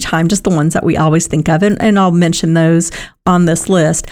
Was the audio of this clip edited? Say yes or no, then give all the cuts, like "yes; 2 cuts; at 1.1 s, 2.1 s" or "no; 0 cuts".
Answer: no; 0 cuts